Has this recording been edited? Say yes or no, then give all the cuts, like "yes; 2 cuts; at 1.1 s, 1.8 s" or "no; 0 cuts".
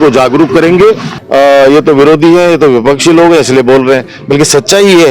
yes; 1 cut; at 1.1 s